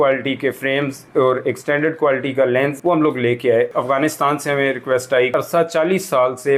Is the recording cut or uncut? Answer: cut